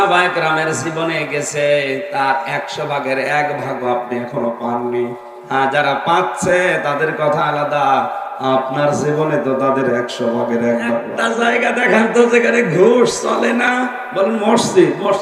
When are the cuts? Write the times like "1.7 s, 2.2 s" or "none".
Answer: 11.2 s